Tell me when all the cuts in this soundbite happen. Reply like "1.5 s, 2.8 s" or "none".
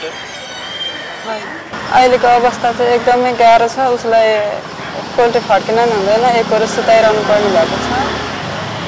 1.7 s